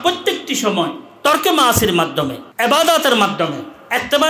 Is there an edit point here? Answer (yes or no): yes